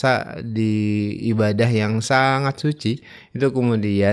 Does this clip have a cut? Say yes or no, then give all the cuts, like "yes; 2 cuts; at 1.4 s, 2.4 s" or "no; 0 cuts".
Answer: no; 0 cuts